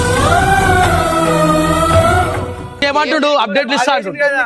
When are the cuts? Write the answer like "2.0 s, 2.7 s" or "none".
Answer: 2.8 s